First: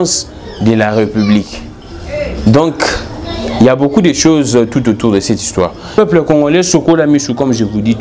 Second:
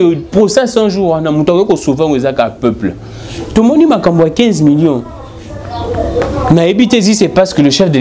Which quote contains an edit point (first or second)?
first